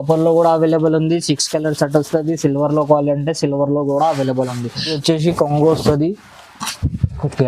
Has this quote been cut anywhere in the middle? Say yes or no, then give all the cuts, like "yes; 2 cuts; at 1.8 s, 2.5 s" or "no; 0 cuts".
yes; 1 cut; at 5.0 s